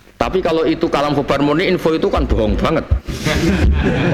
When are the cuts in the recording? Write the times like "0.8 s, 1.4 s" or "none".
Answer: none